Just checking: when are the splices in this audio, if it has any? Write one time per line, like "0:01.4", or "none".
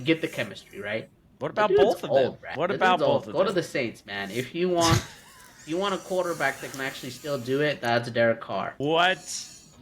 0:02.4
0:08.7